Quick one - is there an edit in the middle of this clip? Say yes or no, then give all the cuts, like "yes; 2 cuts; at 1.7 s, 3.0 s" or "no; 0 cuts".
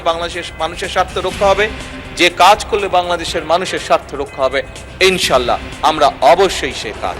no; 0 cuts